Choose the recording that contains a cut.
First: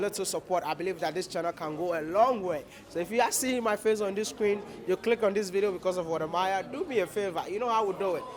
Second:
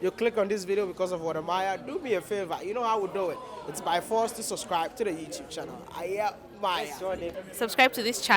second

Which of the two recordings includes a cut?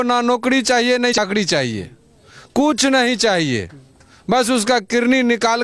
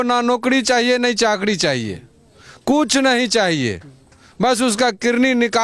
first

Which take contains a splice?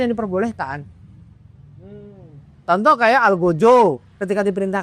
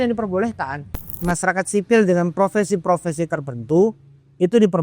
second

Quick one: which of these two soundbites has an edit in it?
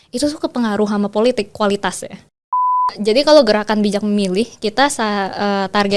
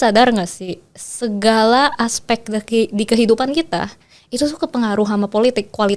first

